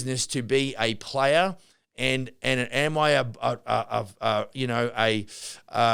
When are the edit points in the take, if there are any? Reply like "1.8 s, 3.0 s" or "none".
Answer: none